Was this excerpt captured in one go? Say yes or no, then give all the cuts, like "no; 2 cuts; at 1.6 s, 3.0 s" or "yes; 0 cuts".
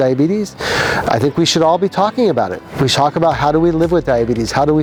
yes; 0 cuts